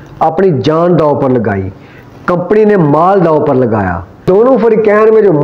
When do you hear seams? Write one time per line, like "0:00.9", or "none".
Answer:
0:04.1